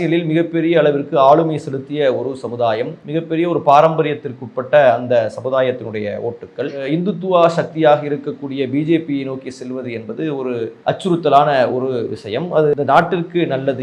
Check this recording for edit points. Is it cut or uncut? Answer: cut